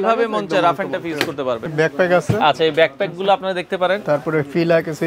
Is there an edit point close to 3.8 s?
no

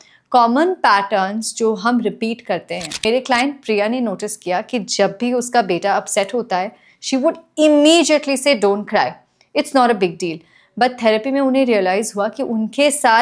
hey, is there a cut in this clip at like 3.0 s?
yes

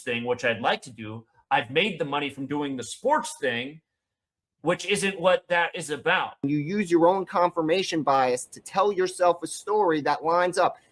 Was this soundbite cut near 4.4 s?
no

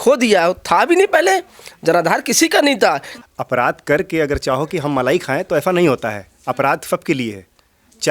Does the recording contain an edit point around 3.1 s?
yes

